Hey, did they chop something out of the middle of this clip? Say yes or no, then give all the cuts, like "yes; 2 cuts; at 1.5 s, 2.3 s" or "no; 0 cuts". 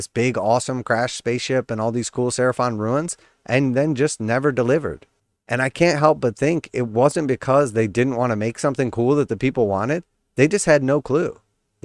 no; 0 cuts